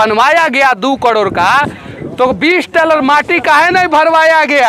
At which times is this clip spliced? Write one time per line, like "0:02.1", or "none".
none